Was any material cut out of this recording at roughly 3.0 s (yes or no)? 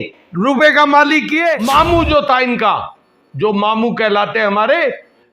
no